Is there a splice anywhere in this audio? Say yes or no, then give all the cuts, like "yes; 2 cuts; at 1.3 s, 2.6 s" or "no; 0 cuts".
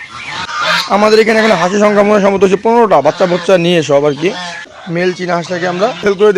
yes; 1 cut; at 4.8 s